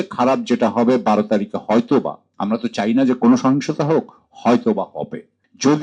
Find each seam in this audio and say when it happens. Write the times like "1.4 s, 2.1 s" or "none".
none